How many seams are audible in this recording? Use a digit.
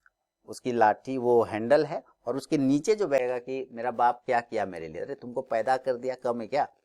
1